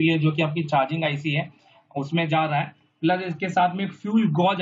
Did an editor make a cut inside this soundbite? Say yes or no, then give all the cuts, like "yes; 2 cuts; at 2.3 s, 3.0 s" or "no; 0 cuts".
no; 0 cuts